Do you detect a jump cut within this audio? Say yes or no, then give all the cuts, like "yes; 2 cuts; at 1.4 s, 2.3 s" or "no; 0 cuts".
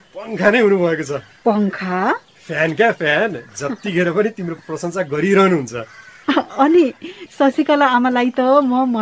no; 0 cuts